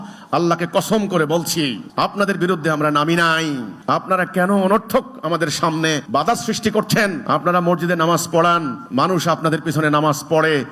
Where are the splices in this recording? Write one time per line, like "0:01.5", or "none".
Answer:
0:01.8
0:03.7
0:06.0
0:07.2
0:08.8